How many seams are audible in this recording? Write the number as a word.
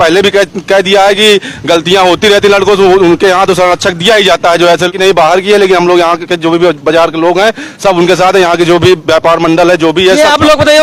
zero